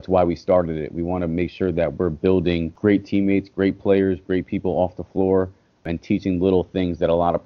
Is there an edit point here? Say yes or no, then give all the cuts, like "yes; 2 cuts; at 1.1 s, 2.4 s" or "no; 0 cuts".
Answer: yes; 2 cuts; at 2.7 s, 5.8 s